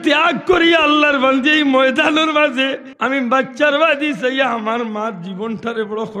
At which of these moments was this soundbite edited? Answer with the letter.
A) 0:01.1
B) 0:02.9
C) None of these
B